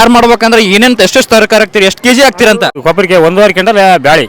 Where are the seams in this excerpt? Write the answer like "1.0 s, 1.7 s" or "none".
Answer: 2.8 s